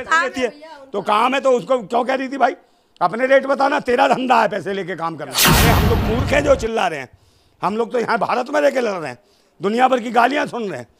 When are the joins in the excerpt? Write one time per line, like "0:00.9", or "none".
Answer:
0:05.6